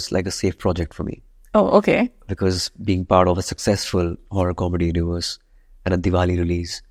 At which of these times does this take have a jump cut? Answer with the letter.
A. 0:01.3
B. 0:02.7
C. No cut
C